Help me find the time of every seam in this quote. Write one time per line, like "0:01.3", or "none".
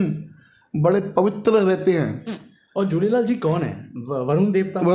none

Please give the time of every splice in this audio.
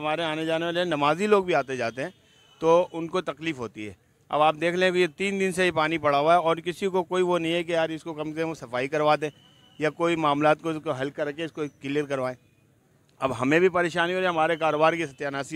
none

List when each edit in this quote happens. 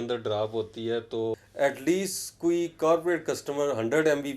0:01.4

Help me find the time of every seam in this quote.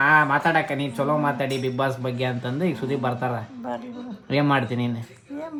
none

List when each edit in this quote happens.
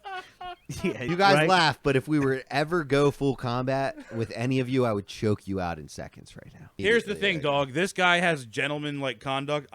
0:01.0
0:06.8

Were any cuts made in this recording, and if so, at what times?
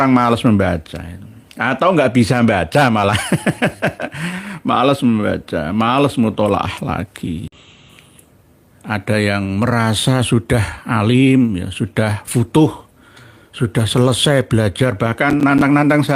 0:07.6

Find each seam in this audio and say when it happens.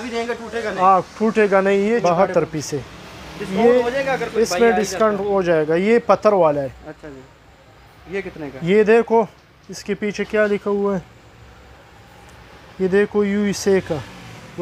0:01.9

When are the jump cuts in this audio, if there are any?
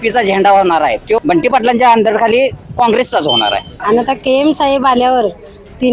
0:01.1
0:03.7

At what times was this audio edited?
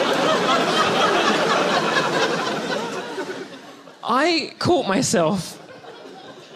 0:04.9

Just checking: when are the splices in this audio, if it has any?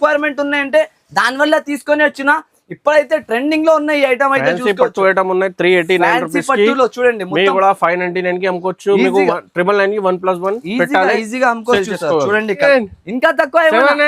0:12.6

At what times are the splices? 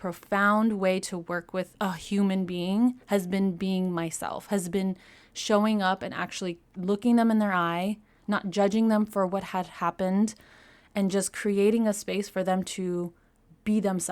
0:01.7

